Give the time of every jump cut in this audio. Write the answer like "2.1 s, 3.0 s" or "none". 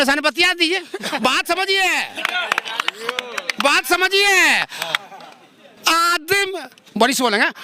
none